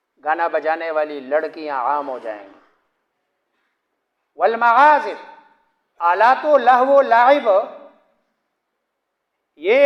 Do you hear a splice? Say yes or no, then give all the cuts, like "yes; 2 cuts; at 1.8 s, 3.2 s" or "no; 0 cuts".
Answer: no; 0 cuts